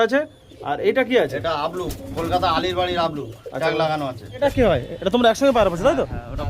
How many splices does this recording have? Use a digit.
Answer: 1